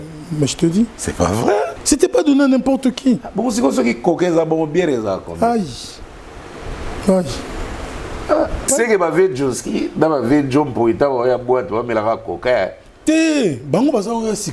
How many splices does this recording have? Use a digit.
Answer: 2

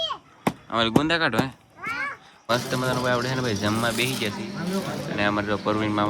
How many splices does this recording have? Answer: 1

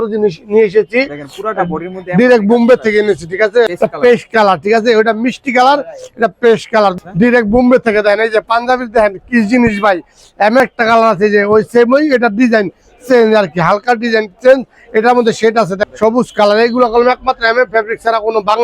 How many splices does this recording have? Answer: 4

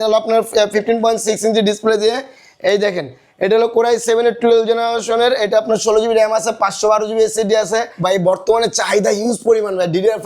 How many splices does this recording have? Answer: 1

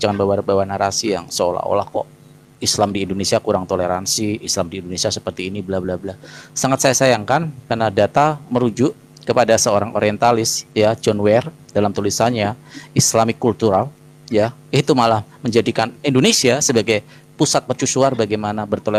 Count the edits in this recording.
0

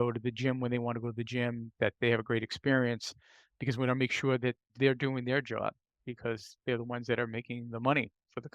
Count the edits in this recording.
2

